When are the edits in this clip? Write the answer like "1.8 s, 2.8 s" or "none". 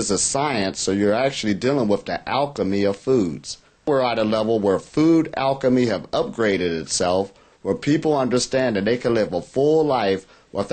3.9 s